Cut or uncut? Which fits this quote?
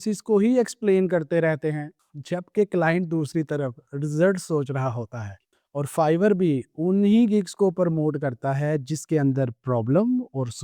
cut